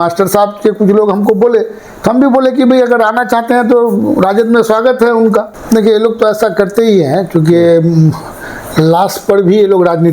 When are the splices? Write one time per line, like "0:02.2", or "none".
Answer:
0:05.5